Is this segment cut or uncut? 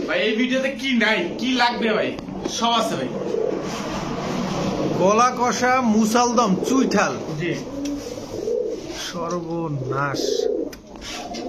uncut